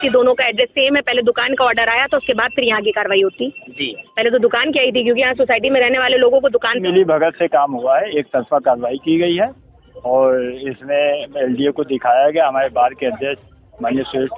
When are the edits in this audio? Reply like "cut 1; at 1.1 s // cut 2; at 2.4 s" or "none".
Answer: cut 1; at 6.8 s